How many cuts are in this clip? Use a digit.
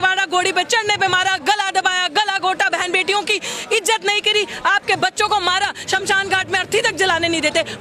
0